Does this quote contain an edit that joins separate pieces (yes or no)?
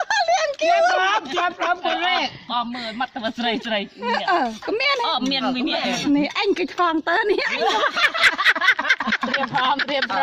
no